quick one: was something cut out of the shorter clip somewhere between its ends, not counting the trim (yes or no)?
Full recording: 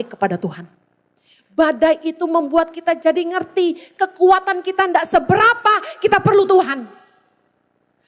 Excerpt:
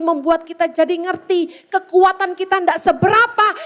no